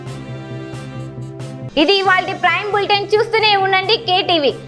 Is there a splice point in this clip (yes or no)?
yes